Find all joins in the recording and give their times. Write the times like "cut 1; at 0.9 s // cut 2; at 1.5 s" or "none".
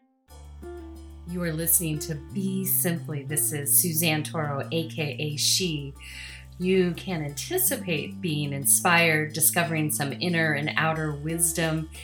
cut 1; at 1.2 s